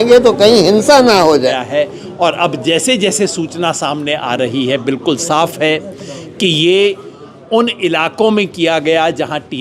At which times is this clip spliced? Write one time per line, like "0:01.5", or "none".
0:01.6